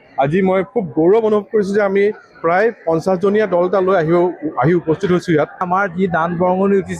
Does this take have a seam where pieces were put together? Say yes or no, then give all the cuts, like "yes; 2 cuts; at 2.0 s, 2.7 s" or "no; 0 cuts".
yes; 1 cut; at 5.6 s